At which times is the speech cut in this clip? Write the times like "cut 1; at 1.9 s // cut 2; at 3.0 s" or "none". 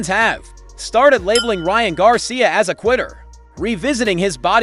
cut 1; at 3.2 s